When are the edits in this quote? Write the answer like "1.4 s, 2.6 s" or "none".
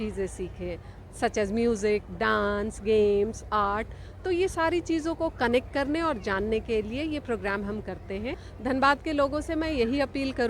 8.5 s